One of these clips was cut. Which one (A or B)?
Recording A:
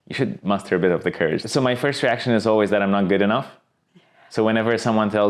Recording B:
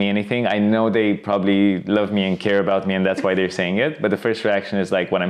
A